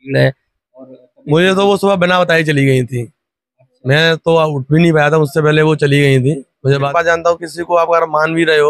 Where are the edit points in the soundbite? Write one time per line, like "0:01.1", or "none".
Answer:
0:06.9